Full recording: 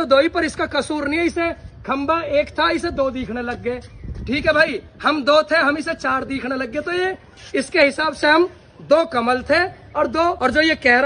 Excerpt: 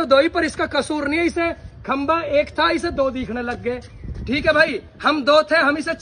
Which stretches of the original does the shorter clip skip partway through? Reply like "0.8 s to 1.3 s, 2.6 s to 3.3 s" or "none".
none